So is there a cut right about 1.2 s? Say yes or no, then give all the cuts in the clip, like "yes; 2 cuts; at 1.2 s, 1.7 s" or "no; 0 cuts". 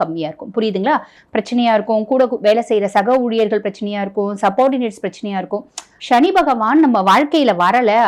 yes; 2 cuts; at 1.2 s, 5.9 s